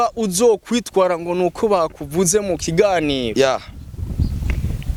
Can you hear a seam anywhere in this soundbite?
no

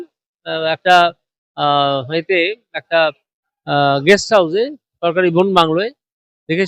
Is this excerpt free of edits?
yes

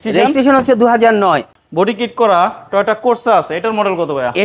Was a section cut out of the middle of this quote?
yes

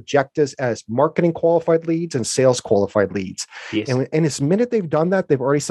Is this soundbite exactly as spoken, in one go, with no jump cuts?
yes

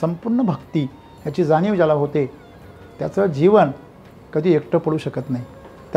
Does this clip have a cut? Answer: no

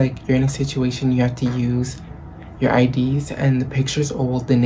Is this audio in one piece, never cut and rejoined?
yes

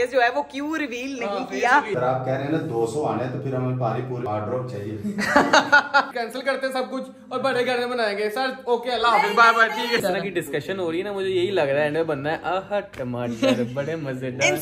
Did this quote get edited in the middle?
yes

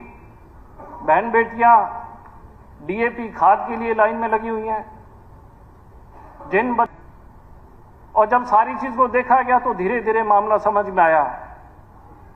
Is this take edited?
yes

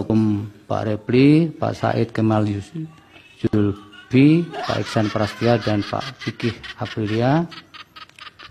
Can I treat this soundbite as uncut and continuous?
yes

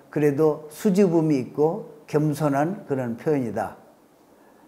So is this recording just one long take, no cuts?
yes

